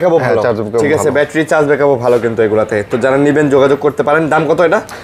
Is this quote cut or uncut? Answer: uncut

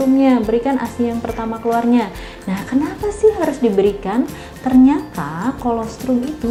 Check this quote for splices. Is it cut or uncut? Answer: uncut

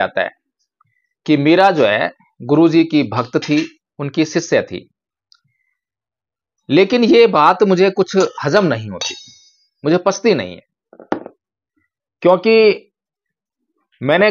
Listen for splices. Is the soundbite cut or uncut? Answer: uncut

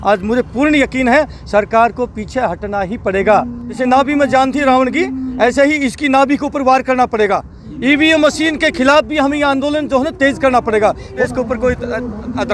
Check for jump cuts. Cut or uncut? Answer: cut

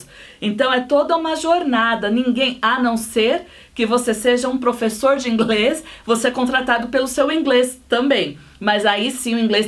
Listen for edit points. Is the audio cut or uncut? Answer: uncut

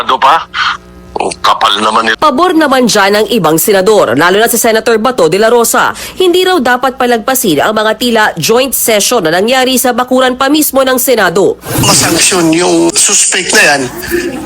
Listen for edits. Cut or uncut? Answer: cut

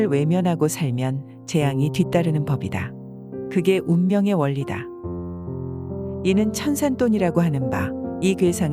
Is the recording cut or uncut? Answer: uncut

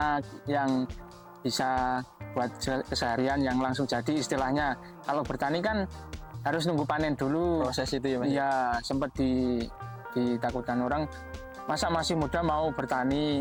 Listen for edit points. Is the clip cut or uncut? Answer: uncut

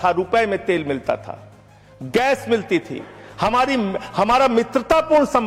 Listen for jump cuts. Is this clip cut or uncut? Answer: uncut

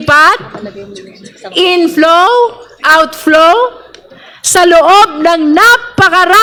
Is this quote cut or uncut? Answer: uncut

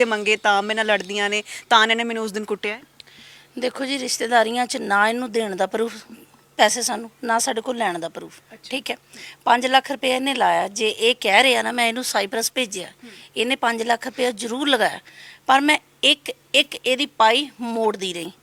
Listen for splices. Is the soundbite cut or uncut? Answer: uncut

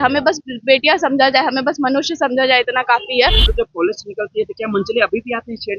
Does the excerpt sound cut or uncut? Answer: cut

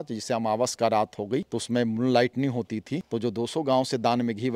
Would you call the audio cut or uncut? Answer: cut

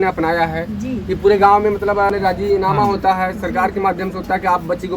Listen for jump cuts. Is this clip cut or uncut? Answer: cut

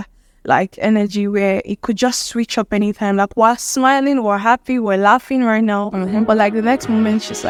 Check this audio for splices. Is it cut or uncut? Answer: uncut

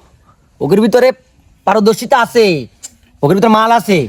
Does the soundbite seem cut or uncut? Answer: uncut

